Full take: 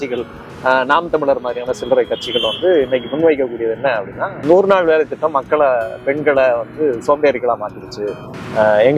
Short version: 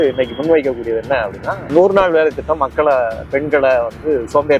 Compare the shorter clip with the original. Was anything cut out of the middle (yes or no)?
no